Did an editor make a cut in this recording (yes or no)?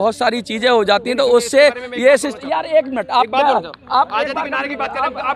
no